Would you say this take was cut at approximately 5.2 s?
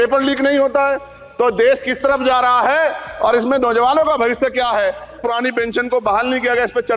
yes; 1 cut; at 5.2 s

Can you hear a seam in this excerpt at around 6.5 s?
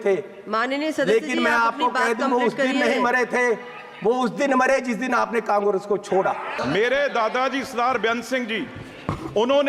yes; 1 cut; at 6.5 s

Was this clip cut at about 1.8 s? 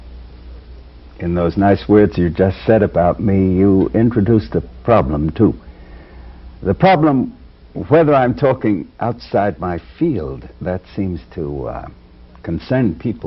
yes; 1 cut; at 1.8 s

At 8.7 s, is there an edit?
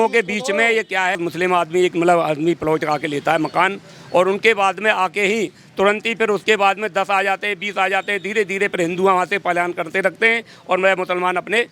no; 1 cut; at 1.1 s

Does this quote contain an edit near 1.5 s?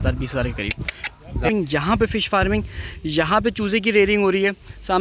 yes; 1 cut; at 1.5 s

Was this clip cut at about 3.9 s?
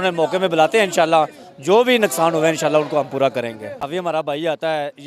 yes; 1 cut; at 3.9 s

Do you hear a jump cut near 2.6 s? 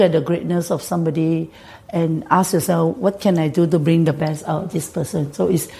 no; 0 cuts

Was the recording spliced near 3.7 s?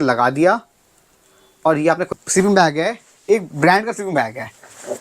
no; 1 cut; at 2.1 s

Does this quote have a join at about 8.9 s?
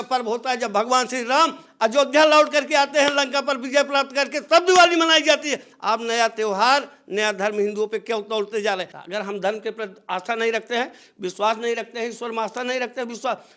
yes; 1 cut; at 8.9 s

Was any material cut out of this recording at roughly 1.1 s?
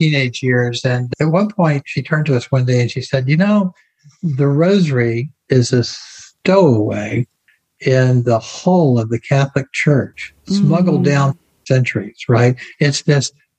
yes; 1 cut; at 1.1 s

